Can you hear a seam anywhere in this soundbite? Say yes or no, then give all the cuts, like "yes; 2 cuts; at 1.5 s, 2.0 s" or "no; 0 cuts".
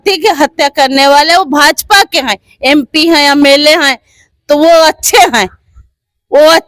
no; 0 cuts